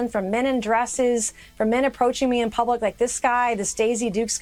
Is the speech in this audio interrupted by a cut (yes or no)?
no